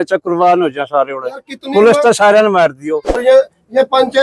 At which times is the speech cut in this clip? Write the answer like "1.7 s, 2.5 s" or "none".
3.2 s